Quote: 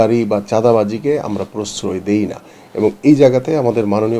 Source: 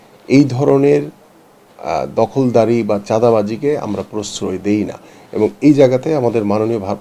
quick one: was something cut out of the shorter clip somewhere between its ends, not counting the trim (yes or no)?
no